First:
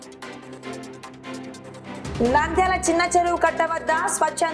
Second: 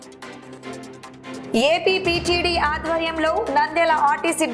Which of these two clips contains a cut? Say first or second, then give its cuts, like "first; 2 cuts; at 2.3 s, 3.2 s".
first; 1 cut; at 1.3 s